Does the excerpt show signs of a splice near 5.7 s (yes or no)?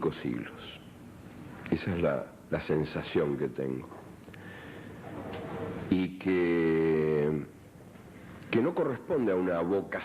yes